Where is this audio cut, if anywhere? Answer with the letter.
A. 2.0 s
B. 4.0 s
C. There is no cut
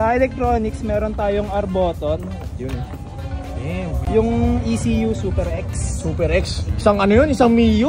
B